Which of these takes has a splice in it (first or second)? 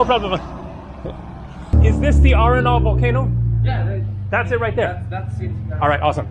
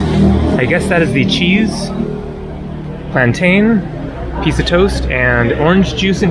first